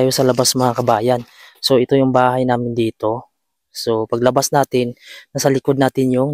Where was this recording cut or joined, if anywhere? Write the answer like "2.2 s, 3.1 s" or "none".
none